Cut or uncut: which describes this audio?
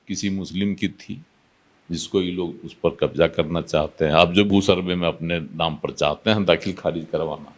uncut